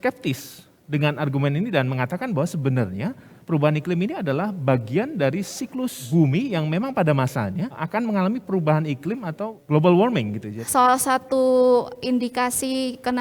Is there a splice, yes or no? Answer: yes